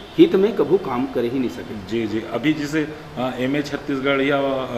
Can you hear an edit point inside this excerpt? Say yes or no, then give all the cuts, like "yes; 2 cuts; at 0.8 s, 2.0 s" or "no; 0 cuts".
no; 0 cuts